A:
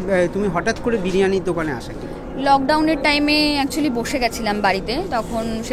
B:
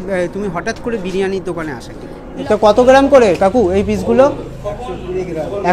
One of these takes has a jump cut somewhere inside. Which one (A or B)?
B